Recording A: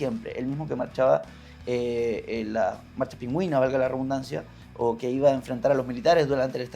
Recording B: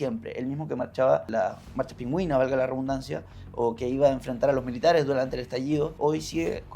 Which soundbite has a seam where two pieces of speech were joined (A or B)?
B